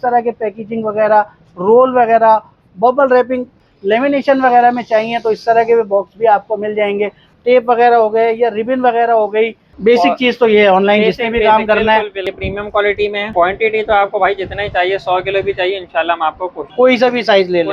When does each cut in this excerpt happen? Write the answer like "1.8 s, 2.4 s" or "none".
3.6 s, 7.3 s, 9.7 s, 12.2 s, 13.3 s, 16.6 s